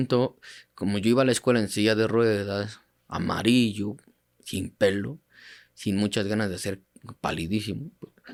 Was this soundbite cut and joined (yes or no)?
no